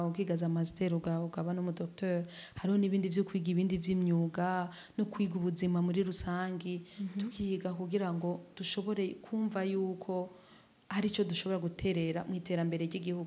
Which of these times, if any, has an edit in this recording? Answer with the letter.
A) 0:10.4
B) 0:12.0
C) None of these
C